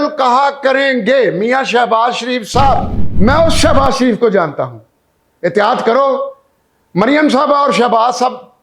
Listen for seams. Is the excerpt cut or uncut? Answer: cut